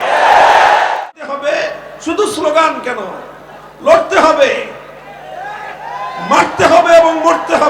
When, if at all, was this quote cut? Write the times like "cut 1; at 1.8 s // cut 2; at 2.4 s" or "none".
cut 1; at 0.9 s